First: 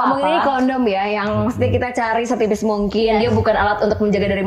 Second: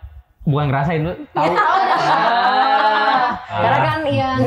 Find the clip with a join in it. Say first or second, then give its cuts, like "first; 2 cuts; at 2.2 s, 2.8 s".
second; 1 cut; at 3.5 s